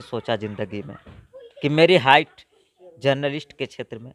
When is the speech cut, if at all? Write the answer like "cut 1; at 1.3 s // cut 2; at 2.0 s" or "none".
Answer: none